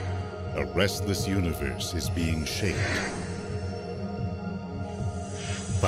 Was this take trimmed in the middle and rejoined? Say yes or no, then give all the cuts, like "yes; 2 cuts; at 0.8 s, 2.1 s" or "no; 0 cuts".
no; 0 cuts